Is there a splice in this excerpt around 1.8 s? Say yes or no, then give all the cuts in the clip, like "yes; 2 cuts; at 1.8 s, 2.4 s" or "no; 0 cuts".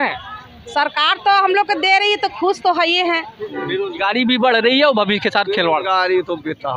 no; 1 cut; at 3.4 s